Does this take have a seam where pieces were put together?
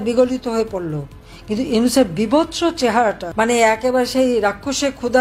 yes; 1 cut; at 3.2 s

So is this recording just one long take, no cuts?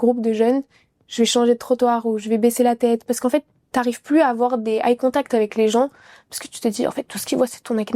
yes; 0 cuts

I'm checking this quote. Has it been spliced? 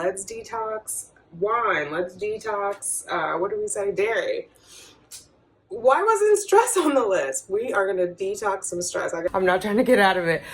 yes; 1 cut; at 9.3 s

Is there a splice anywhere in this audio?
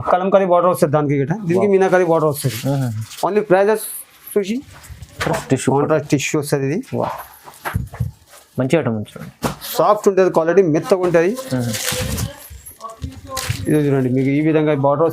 yes; 1 cut; at 5.2 s

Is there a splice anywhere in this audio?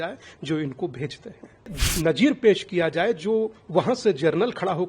yes; 1 cut; at 1.8 s

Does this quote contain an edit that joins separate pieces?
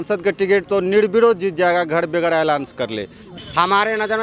yes; 1 cut; at 3.2 s

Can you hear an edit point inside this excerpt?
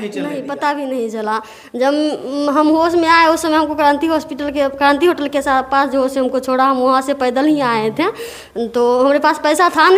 no; 0 cuts

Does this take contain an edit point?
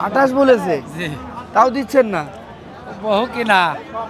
no; 0 cuts

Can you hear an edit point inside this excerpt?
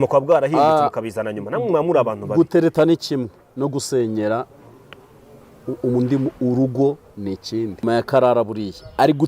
yes; 1 cut; at 7.8 s

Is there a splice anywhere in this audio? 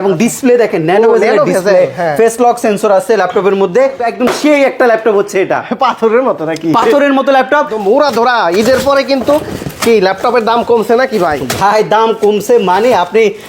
yes; 2 cuts; at 4.0 s, 7.7 s

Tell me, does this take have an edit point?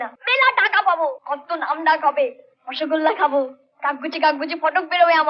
no; 0 cuts

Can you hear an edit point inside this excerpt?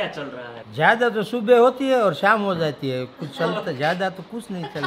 no; 0 cuts

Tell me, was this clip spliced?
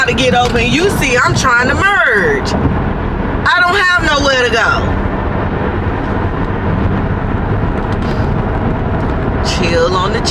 no; 0 cuts

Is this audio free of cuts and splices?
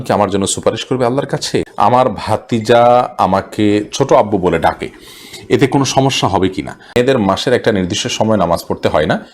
no; 2 cuts; at 1.7 s, 7.0 s

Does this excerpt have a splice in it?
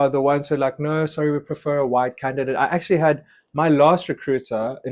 no; 0 cuts

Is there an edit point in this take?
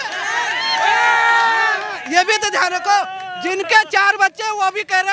no; 0 cuts

